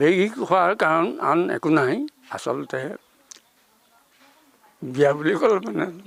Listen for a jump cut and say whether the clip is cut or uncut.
uncut